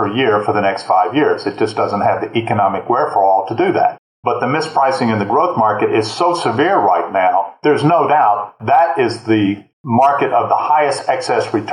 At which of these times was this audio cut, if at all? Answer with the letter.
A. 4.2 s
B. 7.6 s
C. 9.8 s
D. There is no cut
A